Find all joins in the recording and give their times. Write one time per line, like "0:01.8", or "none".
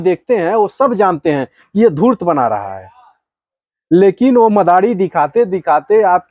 none

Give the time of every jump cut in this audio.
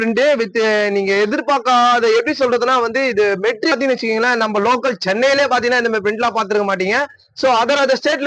0:03.7

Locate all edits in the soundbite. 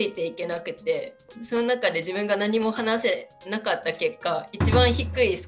none

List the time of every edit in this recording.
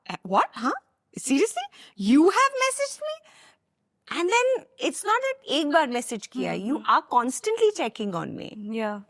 none

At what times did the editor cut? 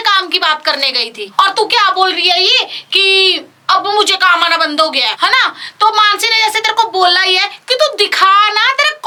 none

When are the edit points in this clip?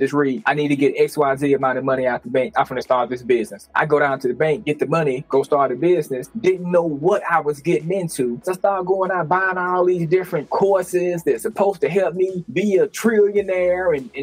0:03.7
0:08.4

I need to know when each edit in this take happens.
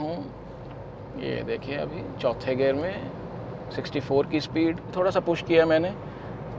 0:04.9

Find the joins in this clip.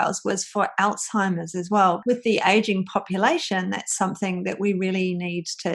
0:02.0

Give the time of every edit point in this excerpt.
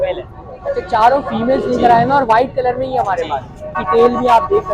0:03.8

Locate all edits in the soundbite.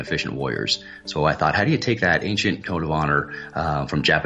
none

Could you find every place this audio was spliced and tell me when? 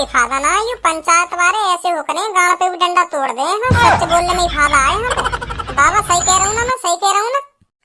none

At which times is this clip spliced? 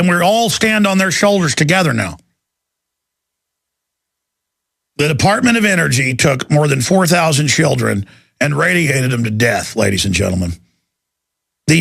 0:08.0

